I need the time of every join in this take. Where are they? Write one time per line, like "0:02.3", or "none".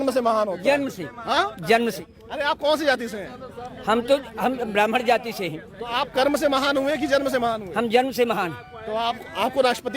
0:02.0